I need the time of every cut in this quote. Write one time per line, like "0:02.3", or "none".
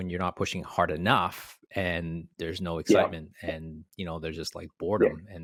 none